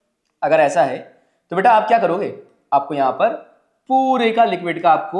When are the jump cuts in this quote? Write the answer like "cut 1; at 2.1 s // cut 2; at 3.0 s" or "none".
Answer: none